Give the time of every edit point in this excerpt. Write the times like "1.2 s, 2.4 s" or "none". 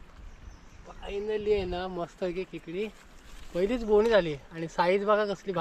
none